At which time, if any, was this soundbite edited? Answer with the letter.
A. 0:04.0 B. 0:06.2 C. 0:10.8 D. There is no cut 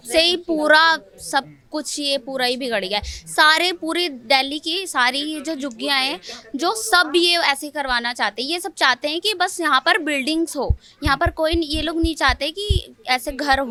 D